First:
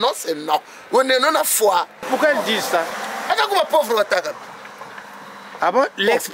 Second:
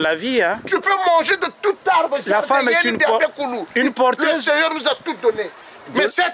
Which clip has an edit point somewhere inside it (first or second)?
first